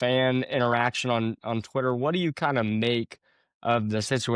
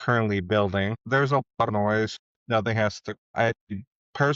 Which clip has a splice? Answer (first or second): second